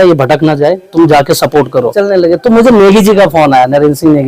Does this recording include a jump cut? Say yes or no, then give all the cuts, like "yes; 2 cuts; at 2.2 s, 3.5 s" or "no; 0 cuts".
yes; 1 cut; at 1.9 s